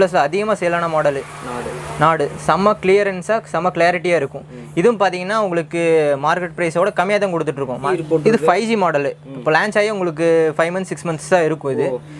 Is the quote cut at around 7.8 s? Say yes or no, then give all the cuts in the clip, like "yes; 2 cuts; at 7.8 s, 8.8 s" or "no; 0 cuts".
yes; 1 cut; at 7.8 s